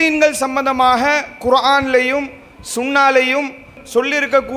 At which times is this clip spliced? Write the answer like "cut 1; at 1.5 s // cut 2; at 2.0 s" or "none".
none